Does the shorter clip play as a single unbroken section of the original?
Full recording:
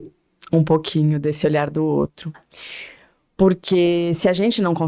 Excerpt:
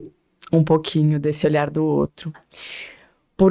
yes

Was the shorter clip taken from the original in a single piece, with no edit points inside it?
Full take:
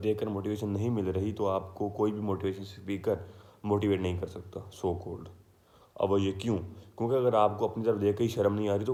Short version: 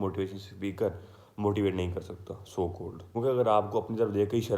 no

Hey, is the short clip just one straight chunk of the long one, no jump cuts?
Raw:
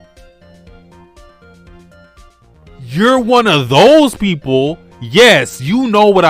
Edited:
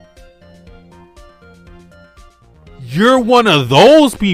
yes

